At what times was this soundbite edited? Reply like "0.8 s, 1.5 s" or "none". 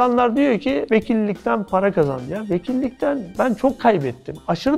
none